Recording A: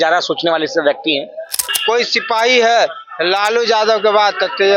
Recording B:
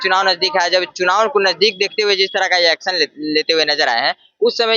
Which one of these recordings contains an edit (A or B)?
A